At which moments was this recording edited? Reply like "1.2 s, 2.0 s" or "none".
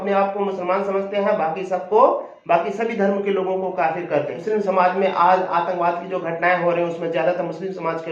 4.4 s